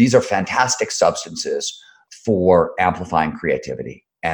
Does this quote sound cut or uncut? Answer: cut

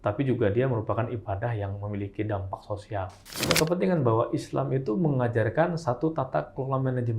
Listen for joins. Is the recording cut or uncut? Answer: cut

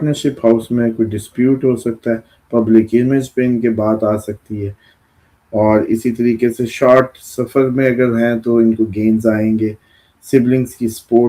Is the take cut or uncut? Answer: cut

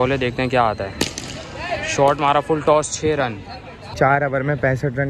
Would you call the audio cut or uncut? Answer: cut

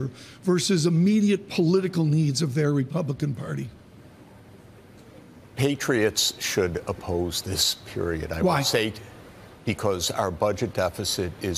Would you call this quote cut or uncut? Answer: uncut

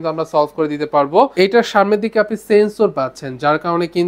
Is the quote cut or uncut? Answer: cut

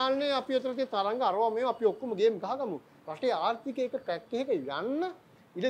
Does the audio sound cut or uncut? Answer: uncut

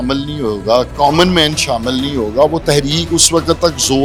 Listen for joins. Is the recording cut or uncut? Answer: uncut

